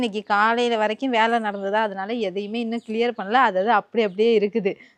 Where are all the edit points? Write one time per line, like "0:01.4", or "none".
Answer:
none